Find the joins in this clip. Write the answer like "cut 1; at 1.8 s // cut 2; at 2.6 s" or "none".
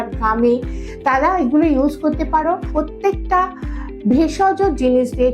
cut 1; at 2.7 s